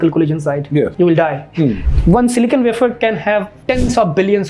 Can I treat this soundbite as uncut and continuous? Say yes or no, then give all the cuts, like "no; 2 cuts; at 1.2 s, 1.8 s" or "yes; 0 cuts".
no; 3 cuts; at 0.9 s, 1.9 s, 3.5 s